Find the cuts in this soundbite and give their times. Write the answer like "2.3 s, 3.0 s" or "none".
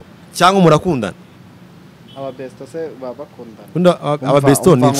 none